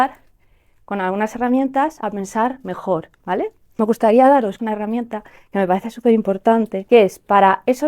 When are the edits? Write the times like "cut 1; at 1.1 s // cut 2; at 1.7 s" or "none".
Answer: cut 1; at 2.0 s // cut 2; at 3.7 s // cut 3; at 4.6 s // cut 4; at 6.8 s